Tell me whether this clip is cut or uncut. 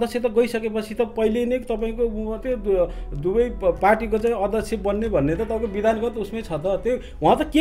uncut